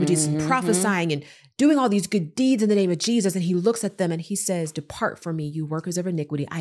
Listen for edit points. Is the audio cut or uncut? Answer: uncut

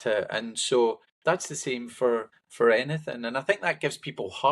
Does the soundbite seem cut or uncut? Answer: cut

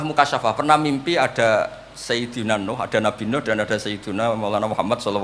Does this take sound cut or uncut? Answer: uncut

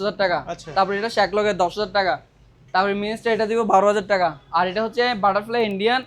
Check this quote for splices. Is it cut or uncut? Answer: uncut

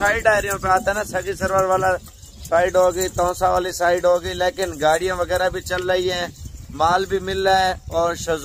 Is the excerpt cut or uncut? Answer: uncut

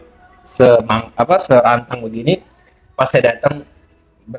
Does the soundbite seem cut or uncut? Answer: uncut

